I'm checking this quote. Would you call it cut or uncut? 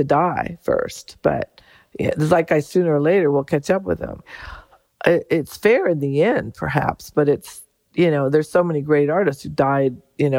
uncut